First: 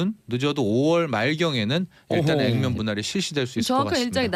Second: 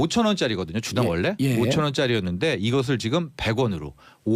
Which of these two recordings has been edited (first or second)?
second